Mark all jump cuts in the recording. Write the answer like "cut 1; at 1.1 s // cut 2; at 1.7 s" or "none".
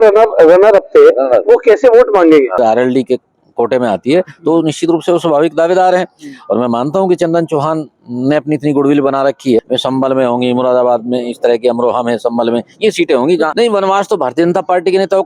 cut 1; at 2.5 s // cut 2; at 9.6 s // cut 3; at 13.5 s